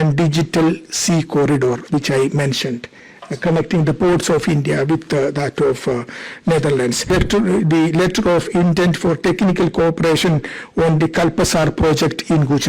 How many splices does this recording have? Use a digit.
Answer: 1